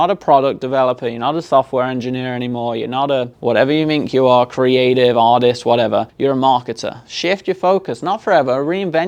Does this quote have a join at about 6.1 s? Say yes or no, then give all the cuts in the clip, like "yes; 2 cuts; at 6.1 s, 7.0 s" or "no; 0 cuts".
yes; 2 cuts; at 3.3 s, 6.1 s